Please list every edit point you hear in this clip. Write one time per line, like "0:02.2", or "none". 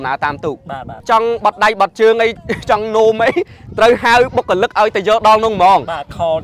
0:01.0